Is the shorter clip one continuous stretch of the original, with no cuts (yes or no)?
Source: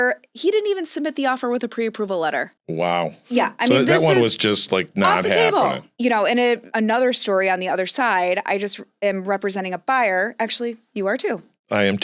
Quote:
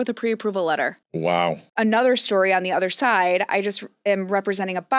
no